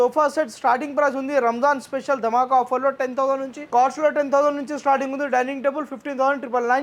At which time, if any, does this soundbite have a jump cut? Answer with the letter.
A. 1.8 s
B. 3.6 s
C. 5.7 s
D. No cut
B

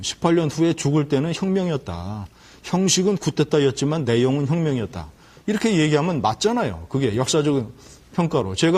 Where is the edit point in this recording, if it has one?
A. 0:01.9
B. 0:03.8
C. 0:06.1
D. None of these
D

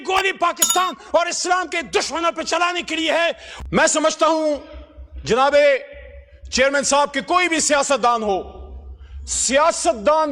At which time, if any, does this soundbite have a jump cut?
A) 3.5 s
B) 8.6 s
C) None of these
A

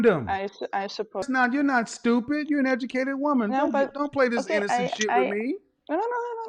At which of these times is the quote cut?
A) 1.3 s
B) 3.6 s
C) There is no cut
A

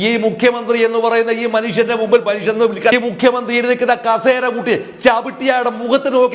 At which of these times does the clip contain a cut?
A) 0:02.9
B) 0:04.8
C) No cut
A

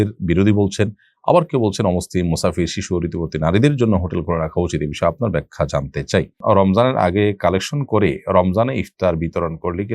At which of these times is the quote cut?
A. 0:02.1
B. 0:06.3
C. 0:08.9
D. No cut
B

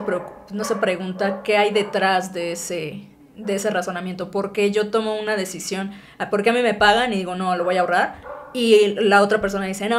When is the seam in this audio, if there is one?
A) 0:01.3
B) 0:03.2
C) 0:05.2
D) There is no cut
D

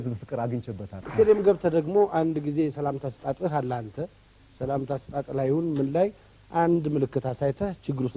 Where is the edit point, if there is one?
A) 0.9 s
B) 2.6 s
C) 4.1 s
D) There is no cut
A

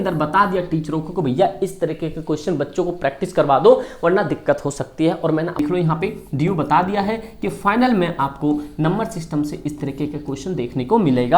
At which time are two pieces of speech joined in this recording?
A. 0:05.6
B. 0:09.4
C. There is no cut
A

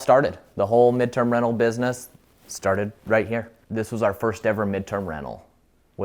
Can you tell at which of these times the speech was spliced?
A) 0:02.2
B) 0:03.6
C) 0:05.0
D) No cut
B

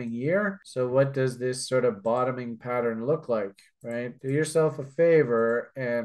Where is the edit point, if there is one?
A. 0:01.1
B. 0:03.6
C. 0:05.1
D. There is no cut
D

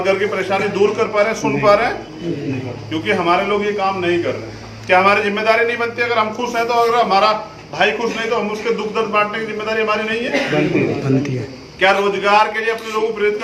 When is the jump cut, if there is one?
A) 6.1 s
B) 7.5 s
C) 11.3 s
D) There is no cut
D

